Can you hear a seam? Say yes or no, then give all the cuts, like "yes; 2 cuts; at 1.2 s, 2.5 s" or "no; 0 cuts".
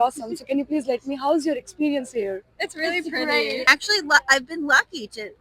yes; 1 cut; at 3.6 s